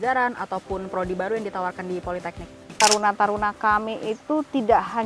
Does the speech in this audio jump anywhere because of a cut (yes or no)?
yes